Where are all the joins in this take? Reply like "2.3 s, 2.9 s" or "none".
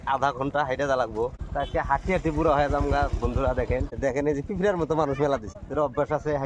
1.4 s, 3.9 s, 5.6 s